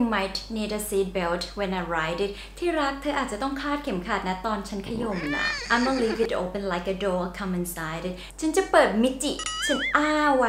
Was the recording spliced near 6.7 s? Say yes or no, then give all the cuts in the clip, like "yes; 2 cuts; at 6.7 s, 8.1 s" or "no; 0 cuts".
no; 0 cuts